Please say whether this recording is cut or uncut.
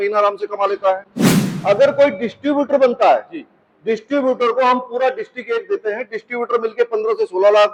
uncut